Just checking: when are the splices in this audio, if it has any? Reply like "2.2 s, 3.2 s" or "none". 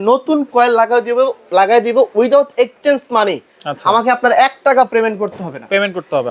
none

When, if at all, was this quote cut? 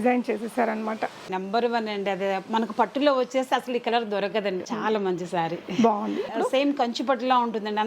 1.4 s, 4.6 s, 6.3 s

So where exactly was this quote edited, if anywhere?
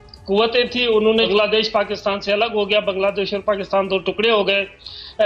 1.3 s

